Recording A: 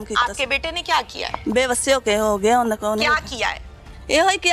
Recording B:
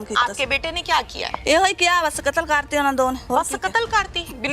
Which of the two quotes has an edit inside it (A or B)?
B